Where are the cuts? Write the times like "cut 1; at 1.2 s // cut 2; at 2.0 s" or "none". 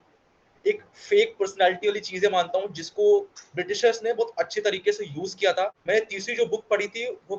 cut 1; at 5.7 s